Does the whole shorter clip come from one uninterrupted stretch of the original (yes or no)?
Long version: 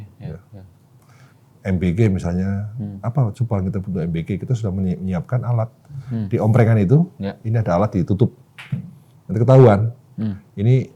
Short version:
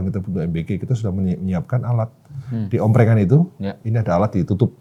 yes